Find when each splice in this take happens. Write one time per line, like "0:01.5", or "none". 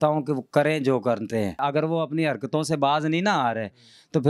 0:01.6